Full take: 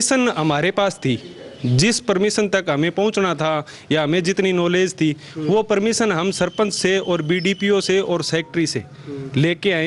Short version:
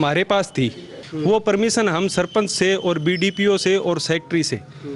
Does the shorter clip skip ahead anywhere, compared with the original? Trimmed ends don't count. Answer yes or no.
yes